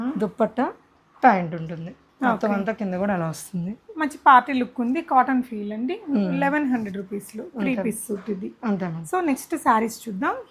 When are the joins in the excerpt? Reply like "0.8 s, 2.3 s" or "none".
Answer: none